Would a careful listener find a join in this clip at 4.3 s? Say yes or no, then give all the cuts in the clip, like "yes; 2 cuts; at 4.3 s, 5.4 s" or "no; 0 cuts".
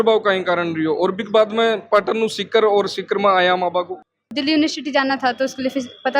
yes; 1 cut; at 4.3 s